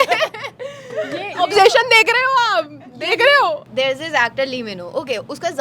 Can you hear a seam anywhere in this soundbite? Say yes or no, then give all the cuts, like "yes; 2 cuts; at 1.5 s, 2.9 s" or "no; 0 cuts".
yes; 1 cut; at 3.6 s